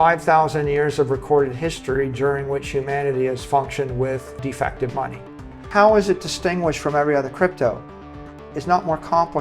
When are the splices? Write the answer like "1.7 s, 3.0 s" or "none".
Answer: 4.3 s, 5.5 s